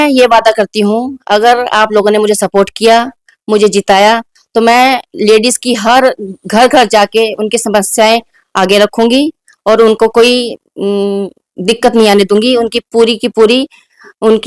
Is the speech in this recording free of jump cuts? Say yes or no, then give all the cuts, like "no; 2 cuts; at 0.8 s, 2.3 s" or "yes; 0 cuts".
yes; 0 cuts